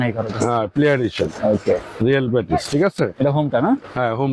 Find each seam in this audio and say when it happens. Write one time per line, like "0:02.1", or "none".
none